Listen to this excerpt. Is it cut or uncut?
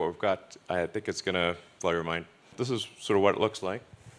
cut